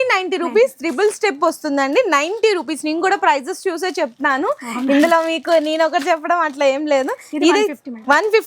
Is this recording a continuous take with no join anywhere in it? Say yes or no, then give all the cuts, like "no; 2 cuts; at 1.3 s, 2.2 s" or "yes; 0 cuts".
yes; 0 cuts